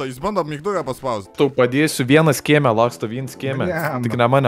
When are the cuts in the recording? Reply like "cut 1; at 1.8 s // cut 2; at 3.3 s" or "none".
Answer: cut 1; at 1.2 s